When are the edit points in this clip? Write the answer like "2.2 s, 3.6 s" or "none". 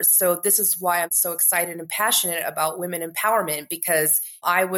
1.1 s

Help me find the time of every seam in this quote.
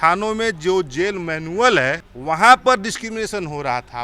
2.1 s

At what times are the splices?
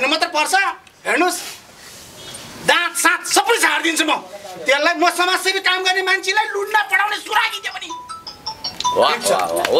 none

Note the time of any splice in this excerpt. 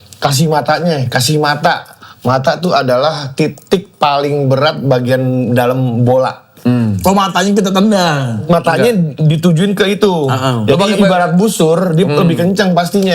none

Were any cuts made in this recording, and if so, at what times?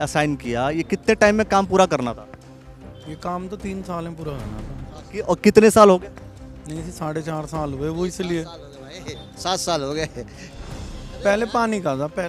none

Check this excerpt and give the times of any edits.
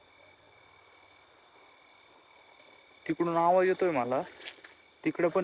none

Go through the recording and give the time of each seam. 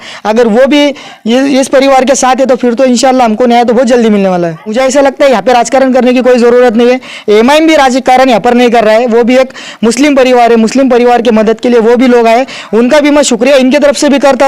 4.7 s

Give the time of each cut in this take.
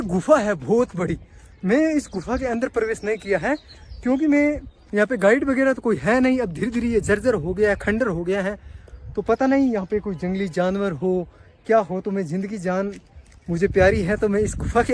none

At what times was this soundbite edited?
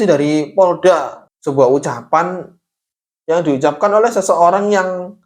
1.2 s

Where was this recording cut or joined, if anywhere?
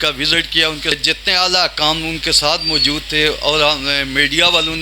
1.0 s

